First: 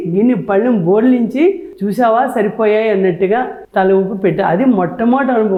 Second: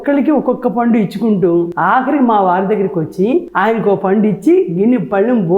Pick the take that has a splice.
second; 2 cuts; at 1.7 s, 3.5 s

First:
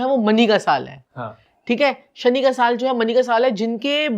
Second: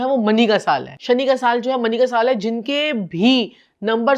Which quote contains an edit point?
second; 1 cut; at 0.9 s

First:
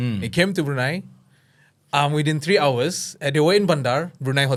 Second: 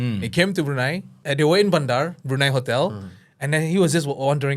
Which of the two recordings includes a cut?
second; 1 cut; at 1.1 s

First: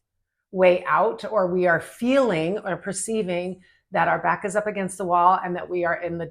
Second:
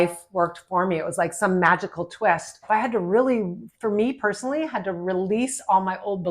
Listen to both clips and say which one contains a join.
second; 1 cut; at 2.5 s

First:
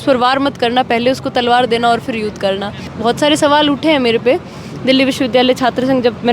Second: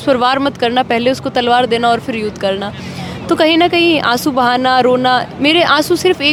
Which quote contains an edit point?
first; 1 cut; at 2.9 s

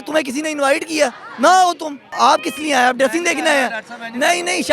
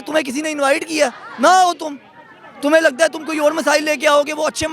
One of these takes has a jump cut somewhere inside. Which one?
first; 1 cut; at 2.1 s

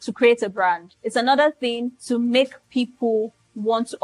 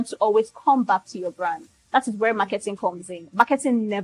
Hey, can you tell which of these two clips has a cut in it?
first; 2 cuts; at 0.9 s, 1.9 s

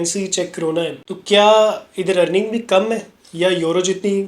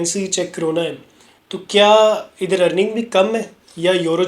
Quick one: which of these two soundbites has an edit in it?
first; 1 cut; at 1.1 s

